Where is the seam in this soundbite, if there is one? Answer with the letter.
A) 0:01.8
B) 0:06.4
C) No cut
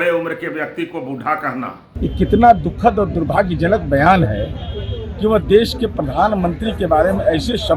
A